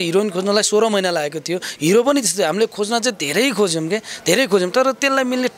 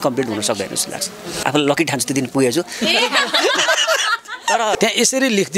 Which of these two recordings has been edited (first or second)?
second